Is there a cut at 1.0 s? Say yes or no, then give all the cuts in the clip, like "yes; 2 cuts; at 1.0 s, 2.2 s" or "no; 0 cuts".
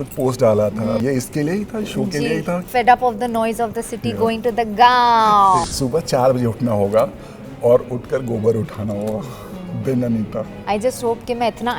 yes; 4 cuts; at 1.0 s, 2.6 s, 5.7 s, 10.6 s